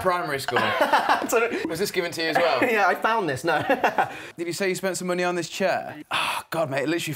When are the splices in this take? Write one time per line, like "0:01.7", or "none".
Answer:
0:01.7
0:04.2
0:05.9